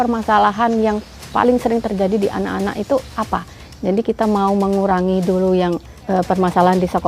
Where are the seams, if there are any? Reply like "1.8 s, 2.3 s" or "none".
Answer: 5.9 s